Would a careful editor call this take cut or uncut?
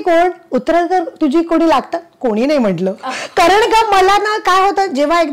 uncut